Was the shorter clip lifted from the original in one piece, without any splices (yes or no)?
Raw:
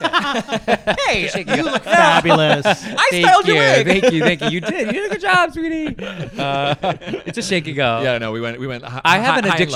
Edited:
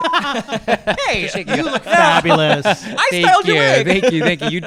yes